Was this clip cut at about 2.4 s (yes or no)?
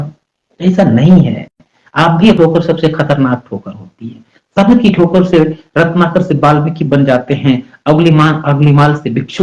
yes